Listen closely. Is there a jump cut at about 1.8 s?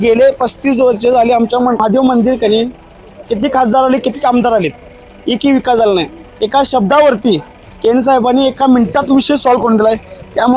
yes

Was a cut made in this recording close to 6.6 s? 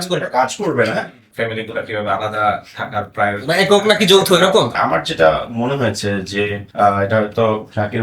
yes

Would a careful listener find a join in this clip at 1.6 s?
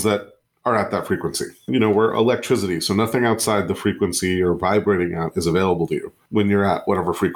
yes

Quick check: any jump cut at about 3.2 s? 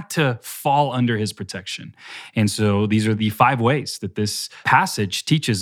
yes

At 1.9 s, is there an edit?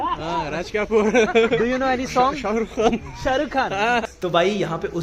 no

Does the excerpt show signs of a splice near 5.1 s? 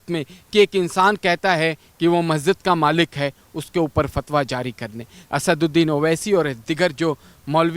yes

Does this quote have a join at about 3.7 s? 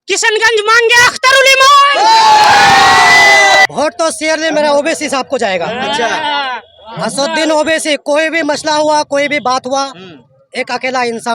yes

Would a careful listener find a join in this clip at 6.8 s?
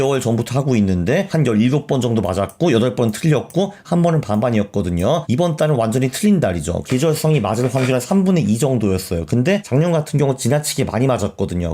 yes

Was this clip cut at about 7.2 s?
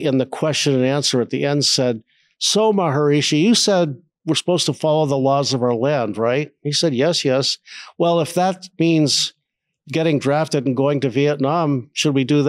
no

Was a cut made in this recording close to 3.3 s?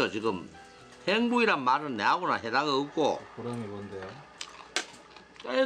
yes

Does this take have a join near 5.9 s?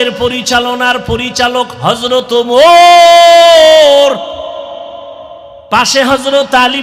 yes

